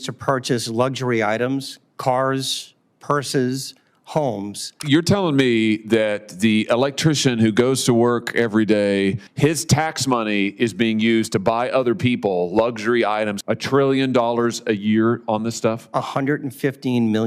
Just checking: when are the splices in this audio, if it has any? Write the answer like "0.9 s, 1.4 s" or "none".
4.8 s, 9.3 s, 13.4 s

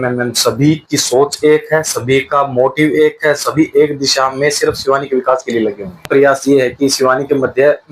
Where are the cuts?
6.0 s

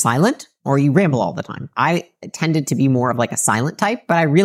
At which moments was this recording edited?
1.6 s

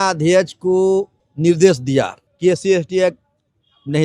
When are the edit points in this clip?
1.2 s, 2.2 s

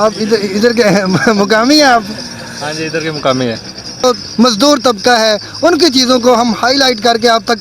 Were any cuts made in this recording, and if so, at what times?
4.0 s

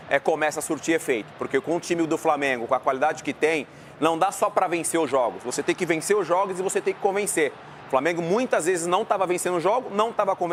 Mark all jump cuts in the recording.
none

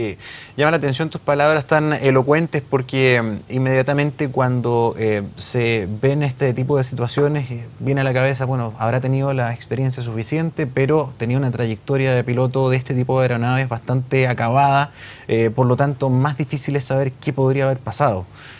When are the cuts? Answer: 5.1 s

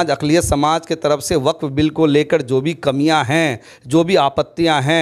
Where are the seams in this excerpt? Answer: none

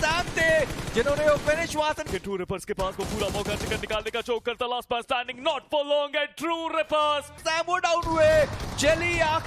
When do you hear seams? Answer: 2.1 s, 7.4 s

